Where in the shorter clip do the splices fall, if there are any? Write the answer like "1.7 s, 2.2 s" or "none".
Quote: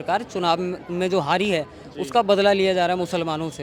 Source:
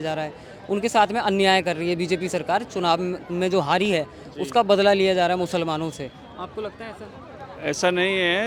none